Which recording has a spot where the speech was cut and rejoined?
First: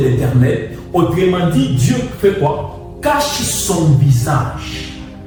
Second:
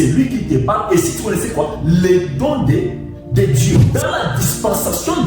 second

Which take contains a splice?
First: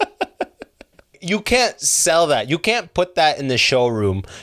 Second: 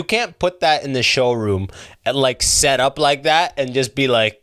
first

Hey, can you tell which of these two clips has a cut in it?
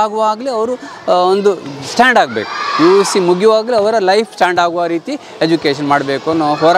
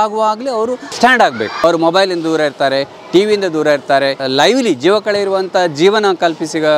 second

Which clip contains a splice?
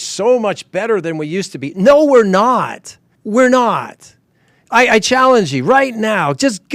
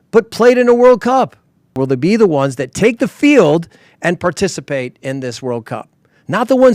second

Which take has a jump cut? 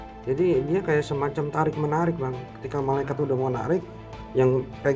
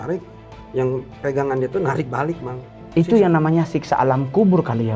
second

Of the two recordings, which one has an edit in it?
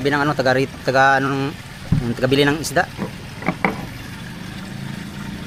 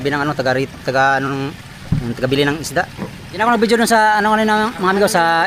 second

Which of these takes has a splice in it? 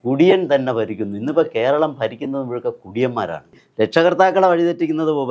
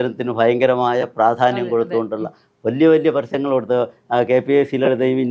first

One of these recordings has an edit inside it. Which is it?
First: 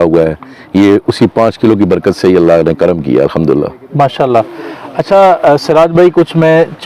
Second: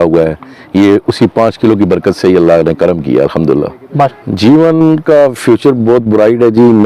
second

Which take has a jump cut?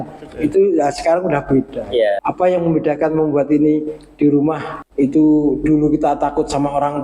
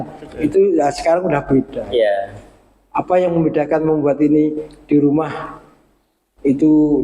first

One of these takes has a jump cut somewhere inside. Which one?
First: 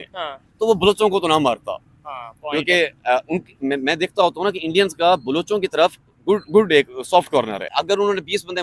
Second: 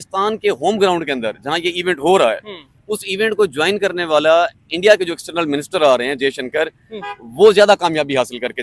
first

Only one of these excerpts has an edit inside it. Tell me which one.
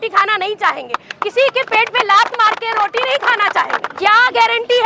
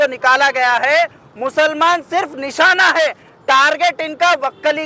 first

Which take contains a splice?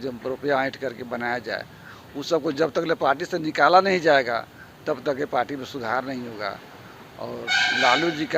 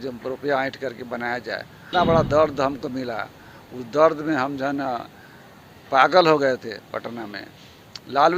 second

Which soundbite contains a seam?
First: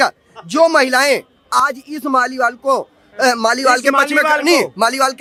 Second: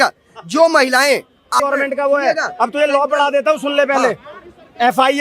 second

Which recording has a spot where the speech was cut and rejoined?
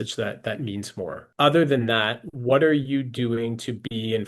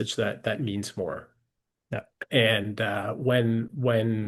first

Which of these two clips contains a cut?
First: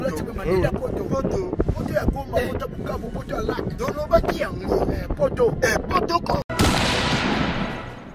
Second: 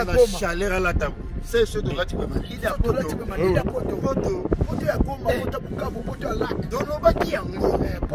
first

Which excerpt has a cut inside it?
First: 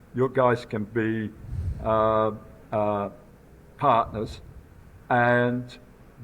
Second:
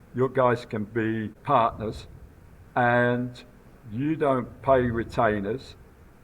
second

